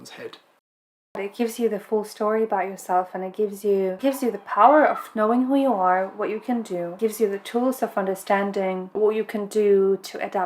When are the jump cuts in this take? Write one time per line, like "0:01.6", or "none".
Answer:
0:01.3
0:04.0
0:07.0
0:08.9